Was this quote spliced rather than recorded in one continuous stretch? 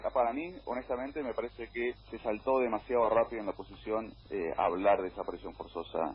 no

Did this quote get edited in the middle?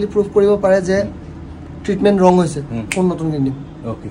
no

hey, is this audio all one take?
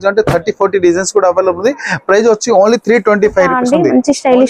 no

